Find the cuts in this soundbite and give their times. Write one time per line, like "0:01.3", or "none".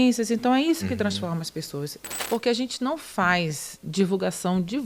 0:01.9

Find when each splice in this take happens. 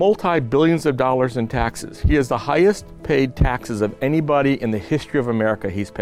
none

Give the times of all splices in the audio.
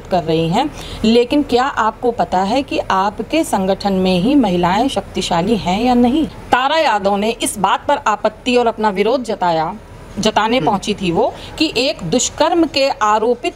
0:06.4

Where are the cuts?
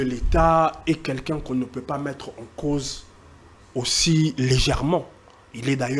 none

